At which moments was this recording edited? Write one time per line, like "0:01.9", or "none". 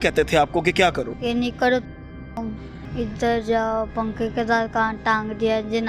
0:01.1
0:02.7